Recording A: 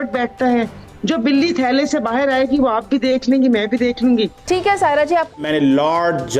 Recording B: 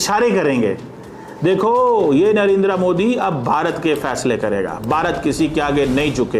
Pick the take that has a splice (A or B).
A